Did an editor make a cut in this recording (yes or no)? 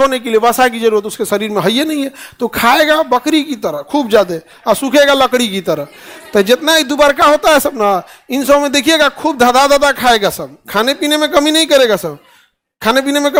no